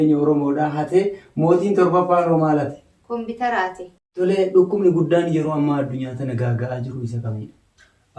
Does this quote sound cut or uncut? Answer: cut